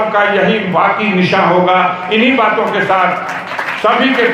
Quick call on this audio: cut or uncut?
uncut